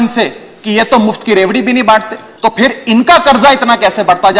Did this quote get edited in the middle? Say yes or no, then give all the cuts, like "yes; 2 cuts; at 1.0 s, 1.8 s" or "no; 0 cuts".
yes; 1 cut; at 2.2 s